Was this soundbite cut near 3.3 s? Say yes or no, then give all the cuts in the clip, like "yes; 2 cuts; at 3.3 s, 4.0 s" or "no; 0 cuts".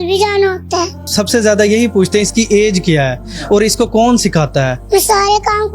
no; 2 cuts; at 1.0 s, 4.8 s